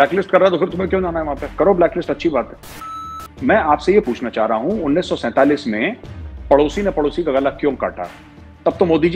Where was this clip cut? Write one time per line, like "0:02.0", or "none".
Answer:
0:02.7